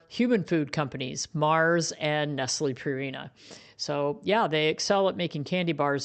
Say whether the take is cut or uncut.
uncut